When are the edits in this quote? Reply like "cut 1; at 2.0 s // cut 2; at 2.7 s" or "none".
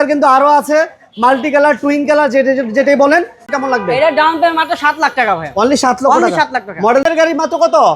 cut 1; at 3.4 s // cut 2; at 7.0 s